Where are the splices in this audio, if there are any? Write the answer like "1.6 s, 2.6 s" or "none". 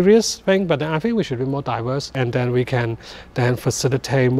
2.2 s